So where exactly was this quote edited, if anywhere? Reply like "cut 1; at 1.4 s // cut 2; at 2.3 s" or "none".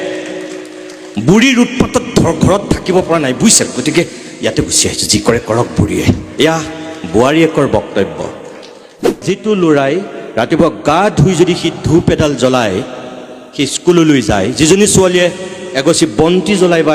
cut 1; at 9.1 s